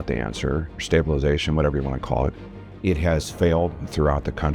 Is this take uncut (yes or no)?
no